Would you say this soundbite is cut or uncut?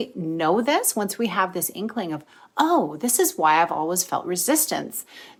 uncut